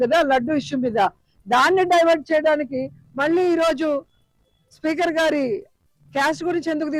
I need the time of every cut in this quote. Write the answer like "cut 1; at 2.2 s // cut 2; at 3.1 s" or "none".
none